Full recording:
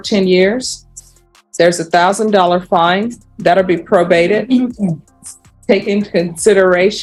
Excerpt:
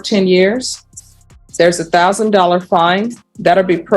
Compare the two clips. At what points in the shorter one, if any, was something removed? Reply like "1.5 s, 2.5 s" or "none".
none